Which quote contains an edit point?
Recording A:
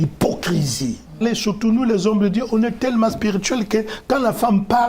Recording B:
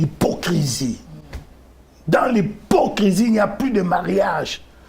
A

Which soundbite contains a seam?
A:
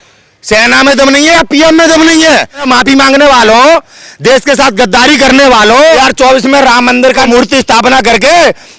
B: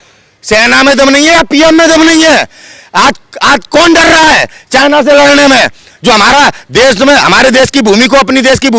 A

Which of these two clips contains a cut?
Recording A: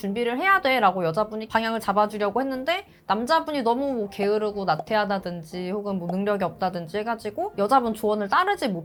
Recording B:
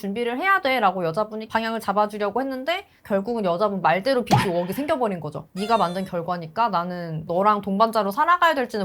B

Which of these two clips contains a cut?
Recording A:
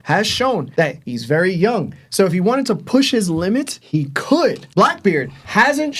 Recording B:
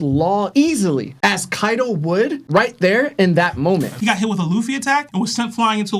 B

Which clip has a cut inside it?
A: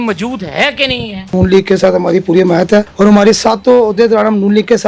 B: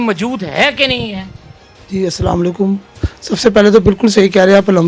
A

